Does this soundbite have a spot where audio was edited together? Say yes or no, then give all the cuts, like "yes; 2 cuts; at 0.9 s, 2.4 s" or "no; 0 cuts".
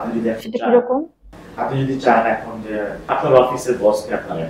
yes; 1 cut; at 3.0 s